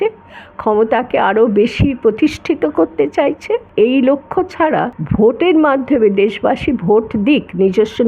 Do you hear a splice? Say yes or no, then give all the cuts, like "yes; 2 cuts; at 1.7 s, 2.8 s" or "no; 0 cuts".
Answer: yes; 2 cuts; at 3.7 s, 5.0 s